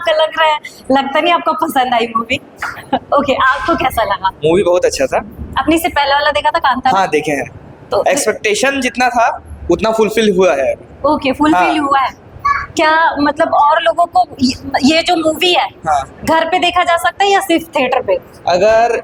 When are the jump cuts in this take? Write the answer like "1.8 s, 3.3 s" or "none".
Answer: none